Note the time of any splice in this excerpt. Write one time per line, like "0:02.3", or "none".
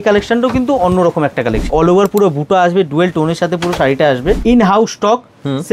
0:01.7
0:04.4